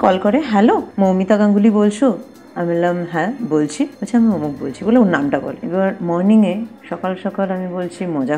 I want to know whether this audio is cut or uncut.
cut